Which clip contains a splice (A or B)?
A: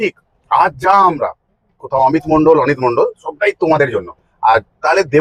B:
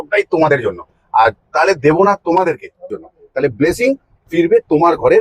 B